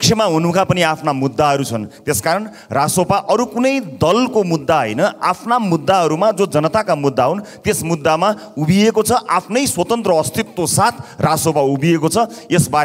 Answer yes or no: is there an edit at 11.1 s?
no